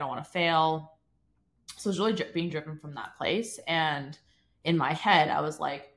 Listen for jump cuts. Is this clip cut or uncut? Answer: uncut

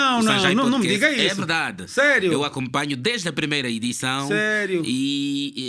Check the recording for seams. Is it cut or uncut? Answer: uncut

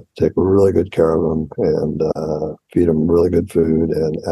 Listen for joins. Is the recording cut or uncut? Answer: uncut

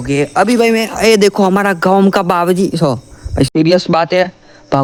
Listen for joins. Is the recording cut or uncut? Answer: uncut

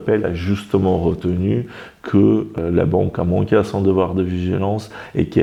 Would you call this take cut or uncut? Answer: uncut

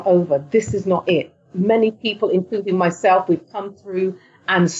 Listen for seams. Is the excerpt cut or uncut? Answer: uncut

